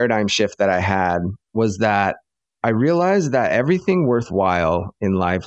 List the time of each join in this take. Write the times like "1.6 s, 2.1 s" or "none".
1.4 s